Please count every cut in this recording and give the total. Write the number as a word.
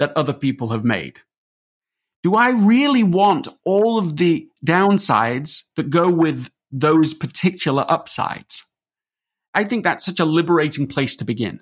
one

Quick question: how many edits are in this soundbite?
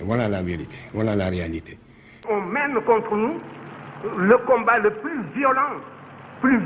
one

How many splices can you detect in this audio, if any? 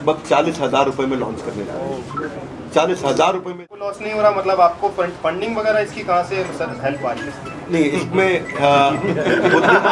one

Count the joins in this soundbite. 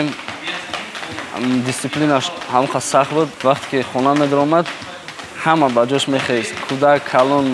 one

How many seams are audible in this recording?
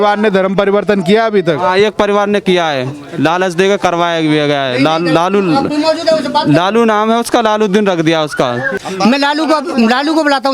one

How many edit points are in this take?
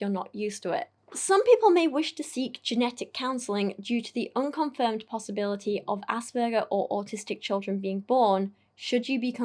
one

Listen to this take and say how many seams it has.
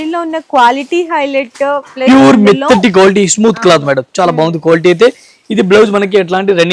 zero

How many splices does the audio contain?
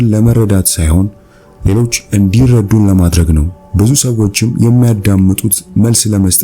one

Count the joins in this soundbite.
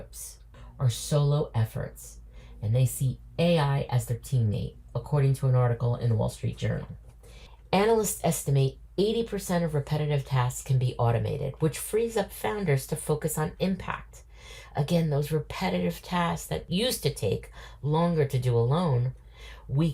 one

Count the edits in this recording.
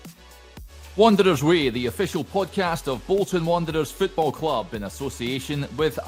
zero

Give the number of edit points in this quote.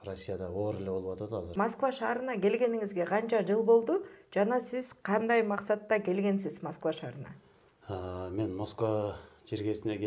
zero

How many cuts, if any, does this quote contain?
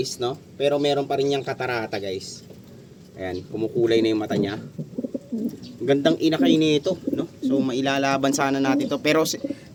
zero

